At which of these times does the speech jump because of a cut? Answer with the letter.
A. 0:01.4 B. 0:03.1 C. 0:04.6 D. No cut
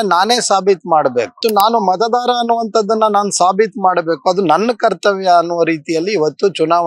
A